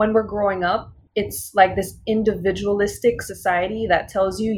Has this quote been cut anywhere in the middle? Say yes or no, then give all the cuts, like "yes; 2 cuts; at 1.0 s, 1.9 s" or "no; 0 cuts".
yes; 1 cut; at 1.0 s